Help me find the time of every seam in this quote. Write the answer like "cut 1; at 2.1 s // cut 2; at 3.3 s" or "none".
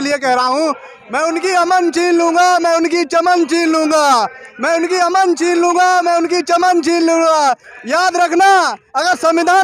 none